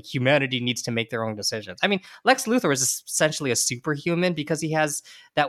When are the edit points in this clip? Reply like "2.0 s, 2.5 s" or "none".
none